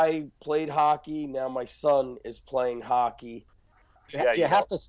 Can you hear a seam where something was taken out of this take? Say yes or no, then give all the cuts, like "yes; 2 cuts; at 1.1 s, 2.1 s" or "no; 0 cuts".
yes; 1 cut; at 3.8 s